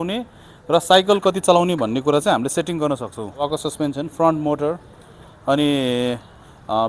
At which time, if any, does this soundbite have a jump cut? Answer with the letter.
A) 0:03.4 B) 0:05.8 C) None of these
A